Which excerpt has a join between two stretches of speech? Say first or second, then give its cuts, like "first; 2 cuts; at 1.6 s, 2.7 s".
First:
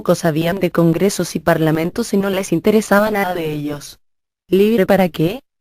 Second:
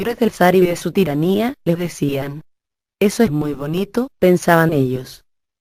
first; 1 cut; at 1.0 s